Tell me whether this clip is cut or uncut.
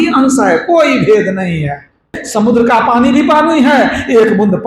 cut